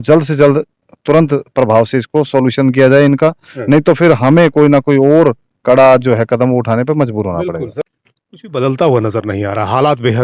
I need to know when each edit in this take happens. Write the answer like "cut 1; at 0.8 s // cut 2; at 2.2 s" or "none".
cut 1; at 7.8 s